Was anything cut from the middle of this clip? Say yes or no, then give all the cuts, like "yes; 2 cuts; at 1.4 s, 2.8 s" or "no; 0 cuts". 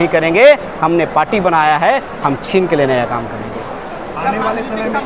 no; 0 cuts